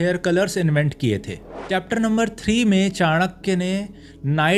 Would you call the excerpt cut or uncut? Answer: cut